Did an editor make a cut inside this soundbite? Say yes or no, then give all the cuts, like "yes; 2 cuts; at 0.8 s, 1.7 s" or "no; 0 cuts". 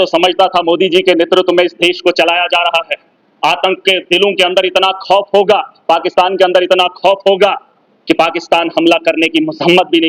no; 0 cuts